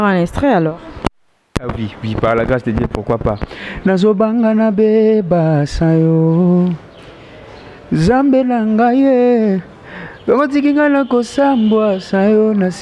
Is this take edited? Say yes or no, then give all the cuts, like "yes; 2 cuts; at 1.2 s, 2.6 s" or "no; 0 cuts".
no; 0 cuts